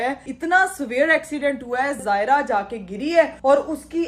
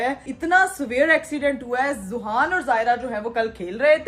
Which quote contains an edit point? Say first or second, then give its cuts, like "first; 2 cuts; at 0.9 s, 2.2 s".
first; 1 cut; at 2.0 s